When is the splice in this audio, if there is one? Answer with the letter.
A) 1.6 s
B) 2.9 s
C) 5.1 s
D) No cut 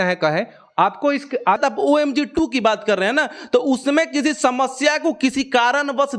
A